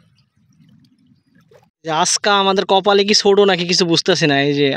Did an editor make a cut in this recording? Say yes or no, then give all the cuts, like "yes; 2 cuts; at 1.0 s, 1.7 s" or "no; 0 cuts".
yes; 1 cut; at 1.7 s